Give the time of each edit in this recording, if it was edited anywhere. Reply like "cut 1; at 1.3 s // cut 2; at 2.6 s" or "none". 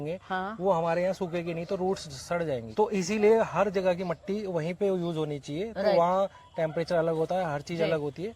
cut 1; at 2.7 s